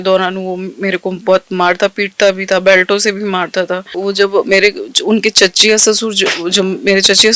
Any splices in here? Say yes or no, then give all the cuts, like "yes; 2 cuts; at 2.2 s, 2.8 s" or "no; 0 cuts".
yes; 1 cut; at 3.9 s